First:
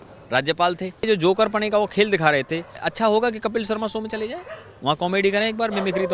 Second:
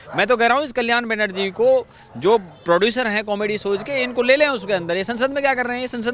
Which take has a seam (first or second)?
first